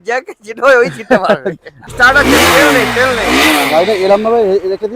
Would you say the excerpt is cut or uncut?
cut